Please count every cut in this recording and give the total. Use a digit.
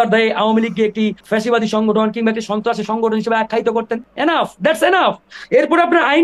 3